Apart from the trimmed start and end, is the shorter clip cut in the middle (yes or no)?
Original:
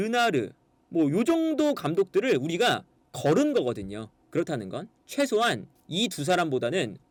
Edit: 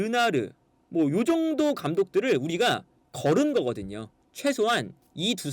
yes